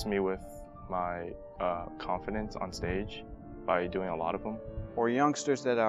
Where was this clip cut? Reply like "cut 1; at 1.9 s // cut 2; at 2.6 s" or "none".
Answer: cut 1; at 1.4 s // cut 2; at 4.8 s